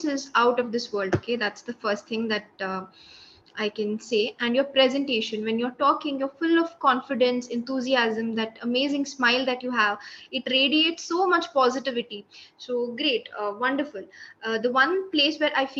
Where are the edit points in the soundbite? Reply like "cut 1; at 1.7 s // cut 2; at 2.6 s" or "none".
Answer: none